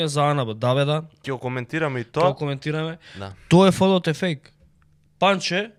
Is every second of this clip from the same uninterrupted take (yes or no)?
yes